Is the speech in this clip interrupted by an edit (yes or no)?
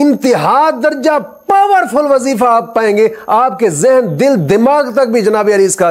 no